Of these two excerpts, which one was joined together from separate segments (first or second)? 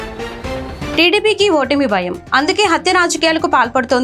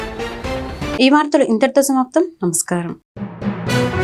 first